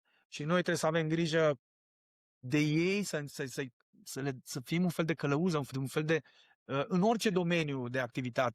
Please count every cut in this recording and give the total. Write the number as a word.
one